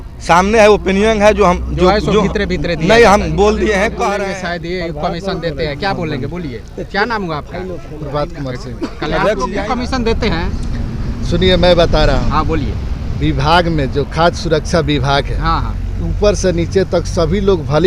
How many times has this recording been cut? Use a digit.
2